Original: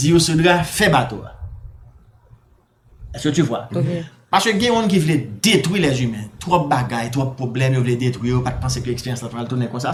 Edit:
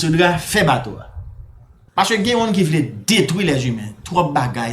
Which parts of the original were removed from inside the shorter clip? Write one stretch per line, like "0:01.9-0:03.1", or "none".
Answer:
0:02.0-0:04.1